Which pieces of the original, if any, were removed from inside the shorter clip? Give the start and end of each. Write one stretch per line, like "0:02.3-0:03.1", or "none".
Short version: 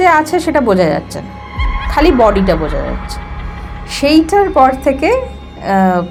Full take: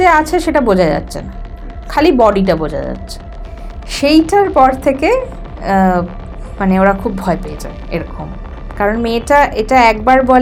none

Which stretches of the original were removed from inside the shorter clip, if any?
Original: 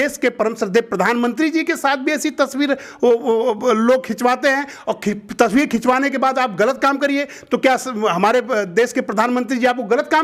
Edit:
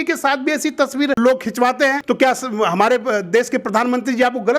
0:02.8-0:03.8
0:04.6-0:07.4

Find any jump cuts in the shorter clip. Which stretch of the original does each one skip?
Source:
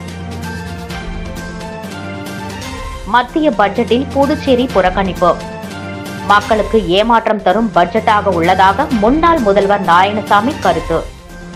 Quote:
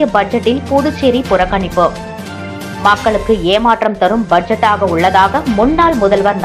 none

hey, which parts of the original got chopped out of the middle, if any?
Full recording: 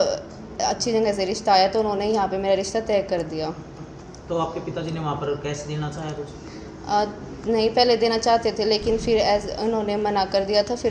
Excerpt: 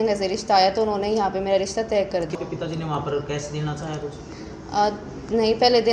0:03.3-0:04.5

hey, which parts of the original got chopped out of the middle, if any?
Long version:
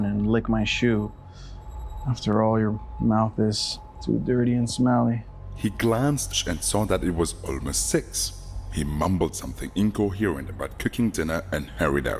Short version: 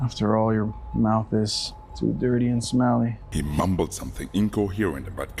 0:05.3-0:08.7

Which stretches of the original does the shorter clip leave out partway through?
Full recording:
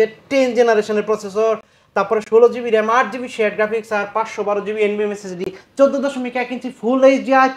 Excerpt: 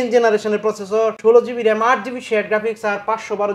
0:01.6-0:02.2

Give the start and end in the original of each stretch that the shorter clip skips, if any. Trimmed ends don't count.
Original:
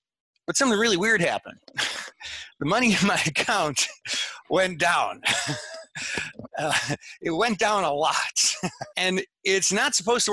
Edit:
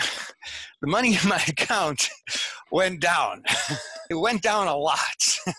0:05.7-0:07.1

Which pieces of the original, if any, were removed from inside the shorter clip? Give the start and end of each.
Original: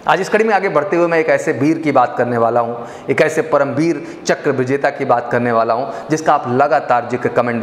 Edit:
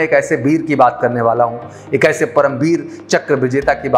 none

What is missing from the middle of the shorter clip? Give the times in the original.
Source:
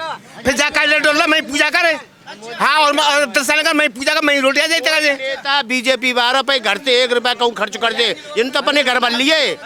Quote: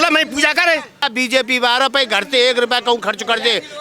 0:02.2-0:05.6

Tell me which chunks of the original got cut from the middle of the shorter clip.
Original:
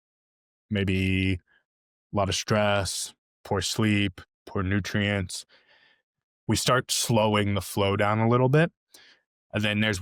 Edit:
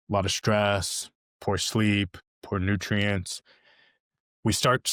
none

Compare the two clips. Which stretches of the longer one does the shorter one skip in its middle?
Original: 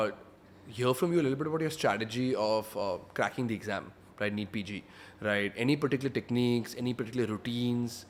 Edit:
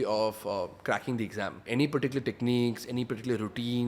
0:03.9-0:05.5

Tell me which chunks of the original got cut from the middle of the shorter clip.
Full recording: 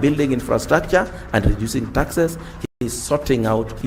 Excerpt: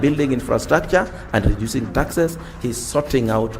0:02.5-0:02.6

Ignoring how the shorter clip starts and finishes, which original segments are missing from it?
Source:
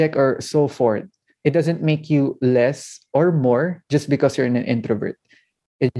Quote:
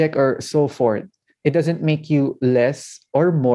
none

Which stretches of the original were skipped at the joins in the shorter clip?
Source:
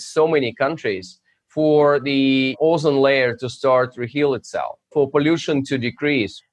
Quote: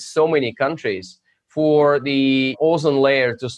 none

